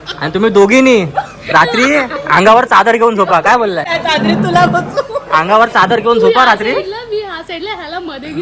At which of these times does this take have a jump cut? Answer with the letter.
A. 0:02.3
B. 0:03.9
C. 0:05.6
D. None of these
B